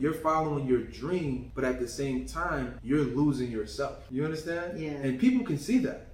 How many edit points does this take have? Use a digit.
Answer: 3